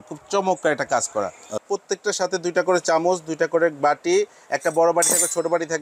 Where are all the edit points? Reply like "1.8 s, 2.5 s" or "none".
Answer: 1.6 s